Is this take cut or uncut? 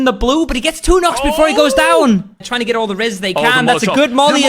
cut